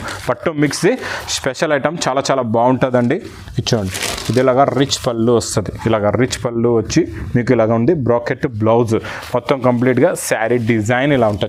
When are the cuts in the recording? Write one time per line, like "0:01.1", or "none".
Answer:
none